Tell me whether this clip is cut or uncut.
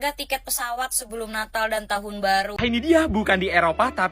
cut